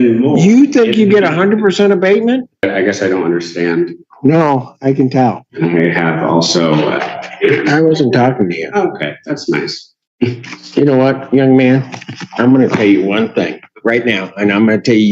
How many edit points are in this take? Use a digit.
2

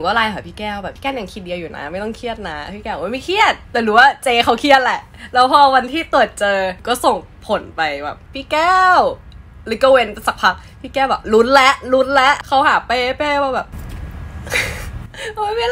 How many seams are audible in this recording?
5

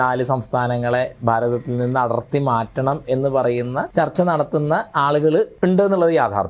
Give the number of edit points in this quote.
2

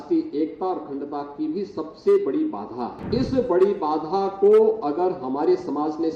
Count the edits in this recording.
1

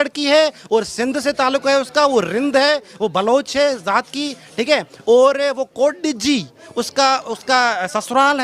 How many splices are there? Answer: 0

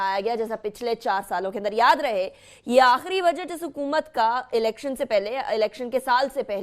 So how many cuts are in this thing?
1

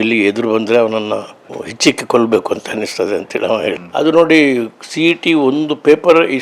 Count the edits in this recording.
1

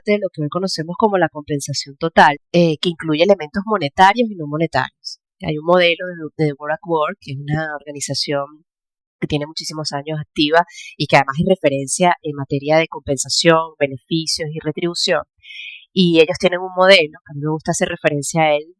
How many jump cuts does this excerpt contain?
1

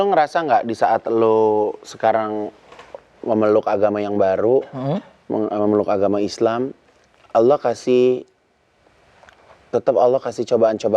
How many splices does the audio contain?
0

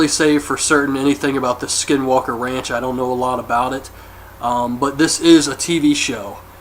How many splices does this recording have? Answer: 1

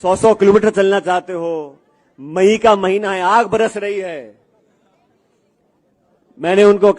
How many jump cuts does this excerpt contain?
0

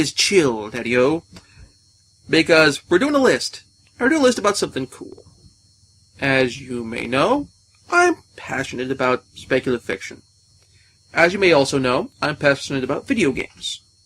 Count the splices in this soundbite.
1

